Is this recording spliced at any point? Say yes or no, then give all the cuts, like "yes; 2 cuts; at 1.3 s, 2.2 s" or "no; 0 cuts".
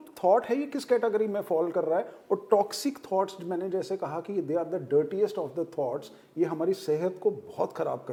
no; 0 cuts